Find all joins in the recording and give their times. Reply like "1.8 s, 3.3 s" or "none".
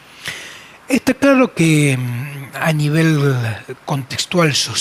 none